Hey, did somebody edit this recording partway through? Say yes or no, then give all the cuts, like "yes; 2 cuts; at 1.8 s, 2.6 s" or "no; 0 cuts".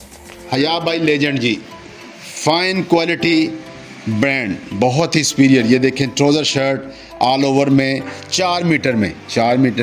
no; 0 cuts